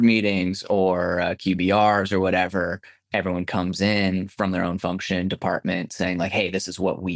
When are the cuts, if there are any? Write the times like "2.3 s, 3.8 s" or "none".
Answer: none